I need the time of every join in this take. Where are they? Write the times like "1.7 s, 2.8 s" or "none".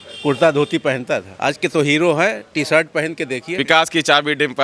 1.3 s, 3.5 s